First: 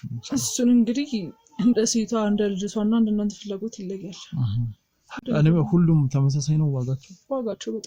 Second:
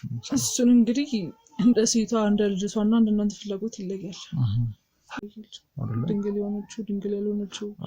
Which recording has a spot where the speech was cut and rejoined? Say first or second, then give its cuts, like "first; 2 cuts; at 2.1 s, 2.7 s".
second; 1 cut; at 5.2 s